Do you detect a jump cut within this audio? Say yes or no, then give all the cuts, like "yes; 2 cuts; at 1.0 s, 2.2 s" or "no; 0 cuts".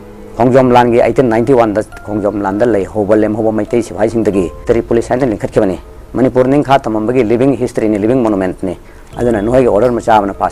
no; 0 cuts